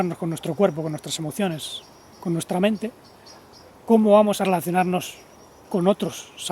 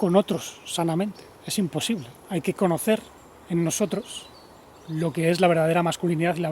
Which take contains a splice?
second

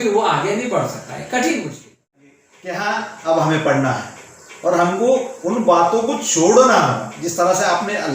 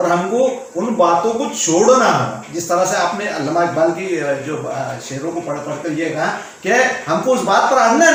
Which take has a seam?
first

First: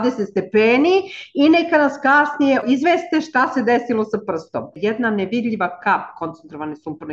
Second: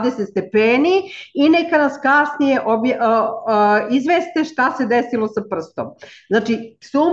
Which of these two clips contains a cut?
first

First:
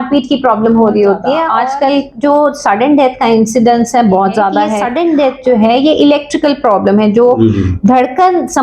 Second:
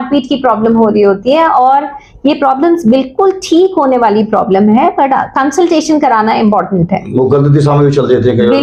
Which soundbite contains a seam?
first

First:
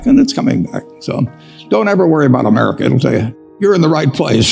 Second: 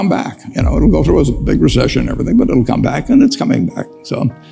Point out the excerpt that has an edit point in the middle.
first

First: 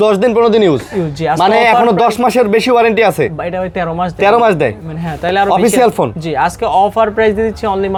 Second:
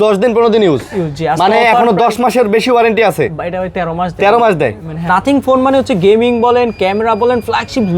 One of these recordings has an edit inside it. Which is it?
second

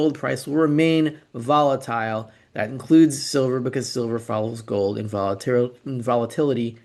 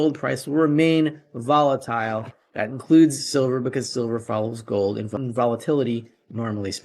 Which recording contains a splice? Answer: second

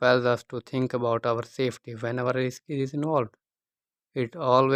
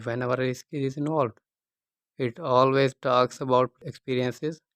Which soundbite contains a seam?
second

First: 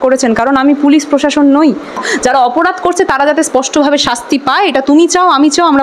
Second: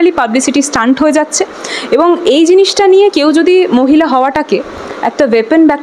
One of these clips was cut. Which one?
first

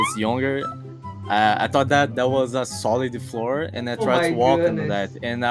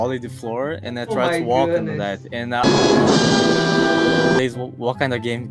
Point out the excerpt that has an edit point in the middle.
second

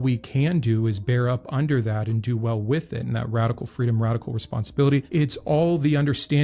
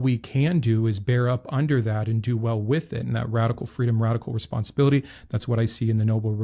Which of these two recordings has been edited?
first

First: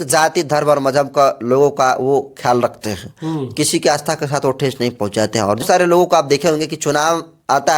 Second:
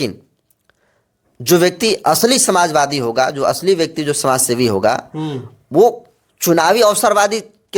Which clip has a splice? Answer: first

